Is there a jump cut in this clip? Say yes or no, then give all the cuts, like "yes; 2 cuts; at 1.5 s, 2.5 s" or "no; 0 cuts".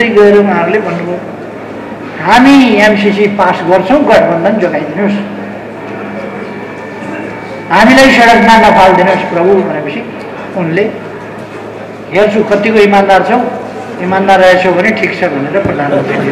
no; 0 cuts